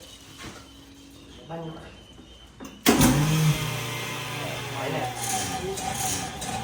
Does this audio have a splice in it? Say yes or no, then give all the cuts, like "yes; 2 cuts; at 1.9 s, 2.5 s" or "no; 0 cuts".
no; 0 cuts